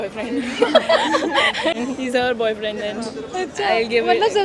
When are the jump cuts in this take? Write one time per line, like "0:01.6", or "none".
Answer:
0:01.8